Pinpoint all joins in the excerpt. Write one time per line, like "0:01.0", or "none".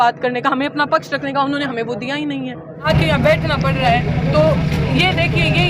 0:02.9